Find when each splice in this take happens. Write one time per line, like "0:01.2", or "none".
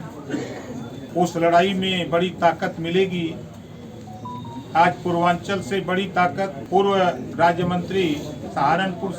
0:01.0
0:06.6